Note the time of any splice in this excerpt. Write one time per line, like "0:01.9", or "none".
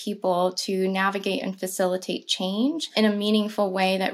0:02.8